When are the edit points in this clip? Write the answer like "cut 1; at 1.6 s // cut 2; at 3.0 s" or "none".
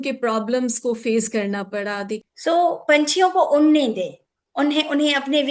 cut 1; at 2.2 s